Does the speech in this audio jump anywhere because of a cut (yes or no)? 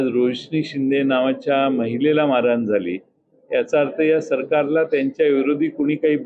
no